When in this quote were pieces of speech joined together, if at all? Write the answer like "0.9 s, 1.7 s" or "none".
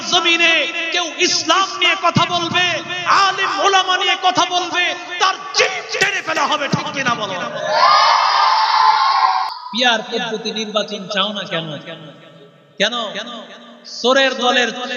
9.5 s